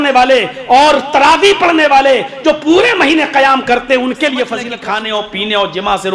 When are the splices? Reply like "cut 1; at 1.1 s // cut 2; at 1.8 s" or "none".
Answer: cut 1; at 4.8 s